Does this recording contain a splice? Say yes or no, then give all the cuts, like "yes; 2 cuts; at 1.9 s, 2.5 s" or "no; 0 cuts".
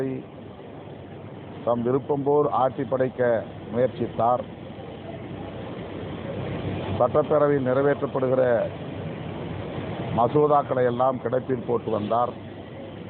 no; 0 cuts